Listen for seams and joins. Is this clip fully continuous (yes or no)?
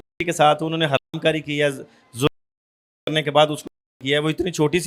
yes